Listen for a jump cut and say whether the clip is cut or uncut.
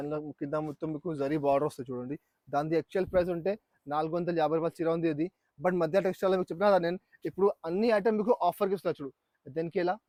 uncut